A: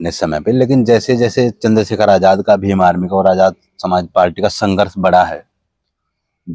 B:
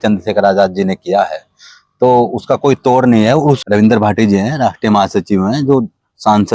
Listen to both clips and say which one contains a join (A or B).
B